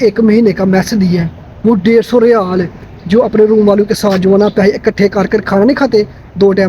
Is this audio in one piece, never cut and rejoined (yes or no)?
yes